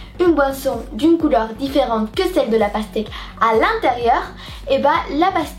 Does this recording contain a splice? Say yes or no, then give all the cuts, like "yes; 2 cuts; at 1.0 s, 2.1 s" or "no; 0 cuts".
no; 0 cuts